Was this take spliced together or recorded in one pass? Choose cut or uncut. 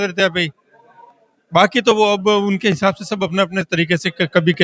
uncut